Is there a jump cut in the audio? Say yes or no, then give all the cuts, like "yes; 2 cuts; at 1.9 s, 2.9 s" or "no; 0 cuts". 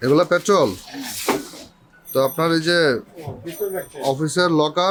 no; 0 cuts